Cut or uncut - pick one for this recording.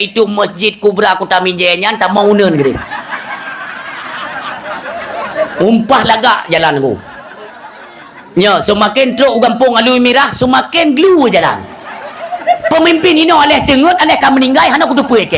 cut